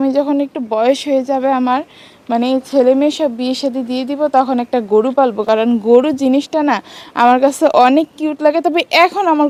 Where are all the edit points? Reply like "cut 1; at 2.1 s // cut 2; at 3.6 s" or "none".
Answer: none